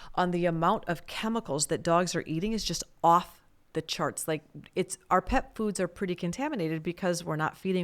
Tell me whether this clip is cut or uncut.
uncut